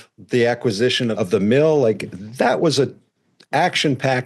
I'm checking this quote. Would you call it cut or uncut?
cut